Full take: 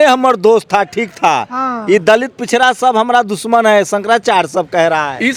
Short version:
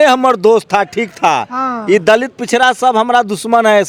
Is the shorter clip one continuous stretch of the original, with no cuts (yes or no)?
yes